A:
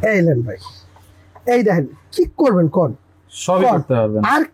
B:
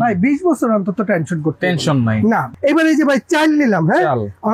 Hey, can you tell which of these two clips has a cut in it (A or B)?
B